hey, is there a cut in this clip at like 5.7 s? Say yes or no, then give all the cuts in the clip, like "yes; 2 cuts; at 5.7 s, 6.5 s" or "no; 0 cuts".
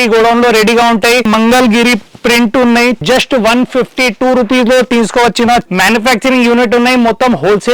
yes; 3 cuts; at 1.3 s, 3.0 s, 5.7 s